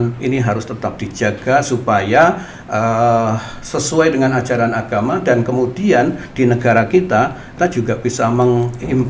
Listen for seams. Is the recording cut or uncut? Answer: cut